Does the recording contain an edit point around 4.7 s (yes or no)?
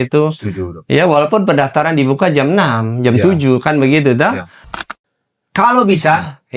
yes